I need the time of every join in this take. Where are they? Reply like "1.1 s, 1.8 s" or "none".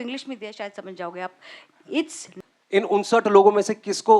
2.3 s